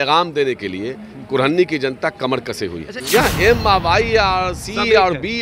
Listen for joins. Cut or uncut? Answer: cut